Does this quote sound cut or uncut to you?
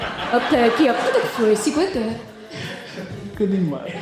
uncut